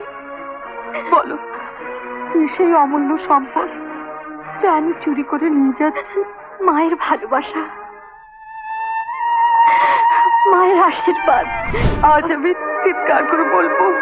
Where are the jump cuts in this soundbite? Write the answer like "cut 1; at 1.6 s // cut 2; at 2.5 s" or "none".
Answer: cut 1; at 11.6 s